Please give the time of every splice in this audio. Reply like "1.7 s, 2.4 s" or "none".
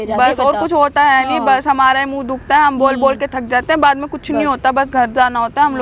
none